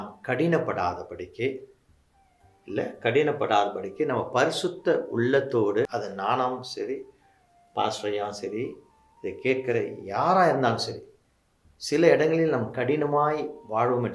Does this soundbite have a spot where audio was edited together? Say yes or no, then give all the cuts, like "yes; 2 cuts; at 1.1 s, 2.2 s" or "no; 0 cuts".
yes; 1 cut; at 5.9 s